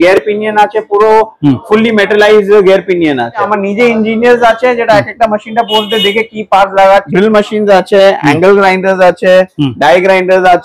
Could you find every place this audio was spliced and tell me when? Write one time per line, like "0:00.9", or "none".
0:03.5
0:07.1